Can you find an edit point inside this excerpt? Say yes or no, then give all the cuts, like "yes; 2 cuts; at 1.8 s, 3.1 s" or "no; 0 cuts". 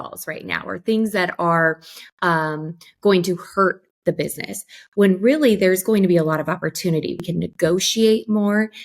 yes; 1 cut; at 7.3 s